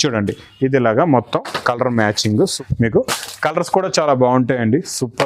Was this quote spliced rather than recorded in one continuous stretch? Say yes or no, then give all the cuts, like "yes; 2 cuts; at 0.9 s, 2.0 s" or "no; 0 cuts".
yes; 1 cut; at 2.6 s